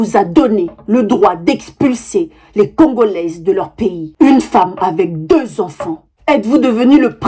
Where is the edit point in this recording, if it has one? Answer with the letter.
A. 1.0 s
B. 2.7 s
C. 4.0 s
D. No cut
D